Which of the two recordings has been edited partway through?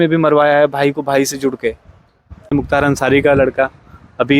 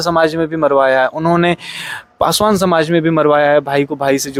first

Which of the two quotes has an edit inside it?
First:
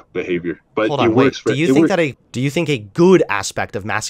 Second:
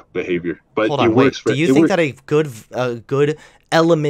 first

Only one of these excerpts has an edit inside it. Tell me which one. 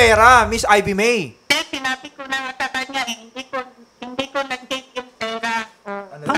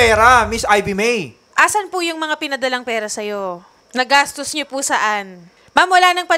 second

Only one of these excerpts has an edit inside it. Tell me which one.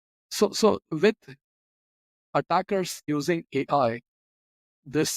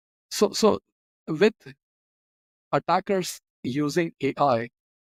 first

